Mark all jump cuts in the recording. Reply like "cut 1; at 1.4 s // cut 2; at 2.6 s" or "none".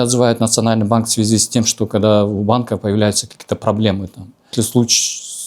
cut 1; at 4.5 s